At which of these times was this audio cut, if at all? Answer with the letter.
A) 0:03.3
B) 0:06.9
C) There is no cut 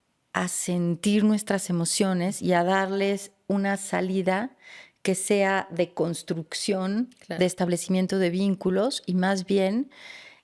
C